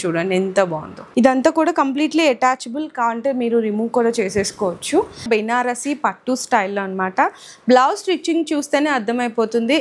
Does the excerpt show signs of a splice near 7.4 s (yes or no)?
no